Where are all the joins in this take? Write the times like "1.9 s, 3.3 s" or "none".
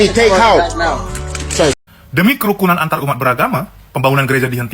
1.8 s